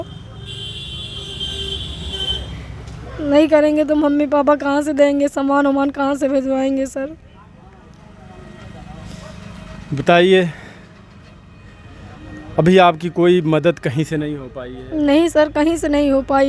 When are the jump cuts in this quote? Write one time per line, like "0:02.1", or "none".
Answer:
none